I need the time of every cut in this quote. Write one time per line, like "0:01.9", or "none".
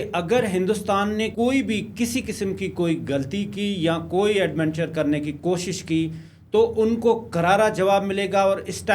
0:01.3